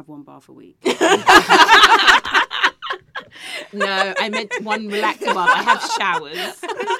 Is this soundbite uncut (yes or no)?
yes